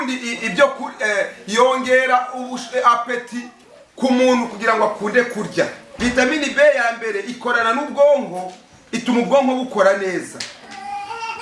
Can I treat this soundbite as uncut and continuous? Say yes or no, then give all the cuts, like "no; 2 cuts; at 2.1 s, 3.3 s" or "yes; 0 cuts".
no; 1 cut; at 5.8 s